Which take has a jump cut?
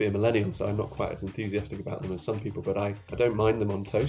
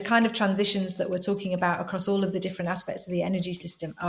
first; 1 cut; at 3.0 s

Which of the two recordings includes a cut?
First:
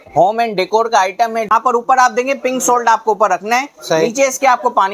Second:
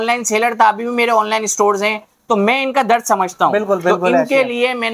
first; 1 cut; at 1.5 s

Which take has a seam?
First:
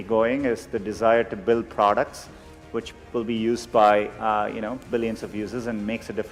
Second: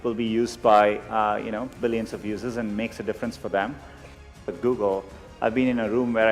second; 1 cut; at 4.2 s

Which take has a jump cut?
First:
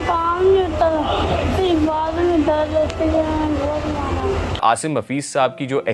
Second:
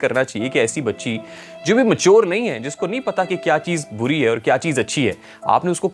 first; 1 cut; at 4.6 s

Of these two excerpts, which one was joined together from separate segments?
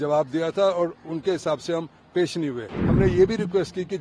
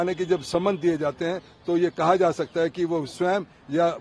first; 1 cut; at 2.8 s

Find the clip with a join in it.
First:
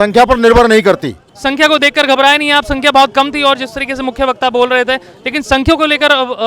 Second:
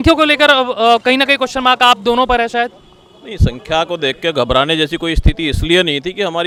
first; 1 cut; at 1.3 s

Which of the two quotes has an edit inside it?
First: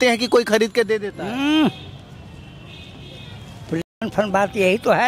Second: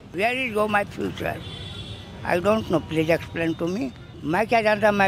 second; 1 cut; at 4.1 s

